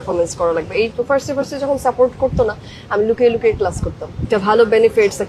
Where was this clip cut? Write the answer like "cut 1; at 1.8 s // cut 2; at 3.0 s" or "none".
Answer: cut 1; at 0.9 s // cut 2; at 4.2 s